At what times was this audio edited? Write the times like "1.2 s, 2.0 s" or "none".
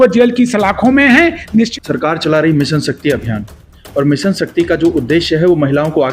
1.7 s